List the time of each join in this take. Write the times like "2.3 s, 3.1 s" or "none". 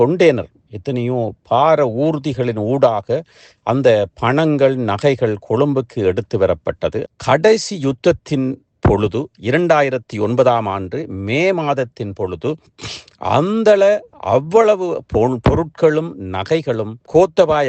7.0 s